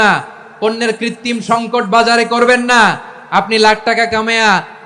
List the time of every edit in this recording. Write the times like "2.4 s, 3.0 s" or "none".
none